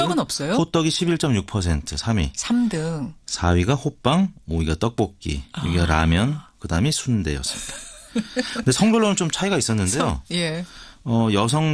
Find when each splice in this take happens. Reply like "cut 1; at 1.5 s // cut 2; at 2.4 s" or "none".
cut 1; at 3.1 s